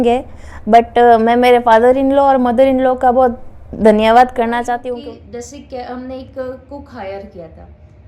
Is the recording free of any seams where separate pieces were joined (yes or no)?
no